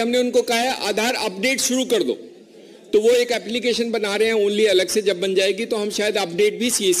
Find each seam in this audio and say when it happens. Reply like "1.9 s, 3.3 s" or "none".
none